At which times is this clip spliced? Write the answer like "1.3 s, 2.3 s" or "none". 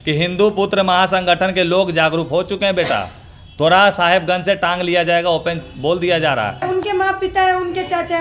6.6 s